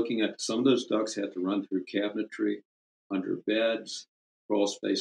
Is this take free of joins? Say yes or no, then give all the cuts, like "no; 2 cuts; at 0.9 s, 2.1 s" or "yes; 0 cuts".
yes; 0 cuts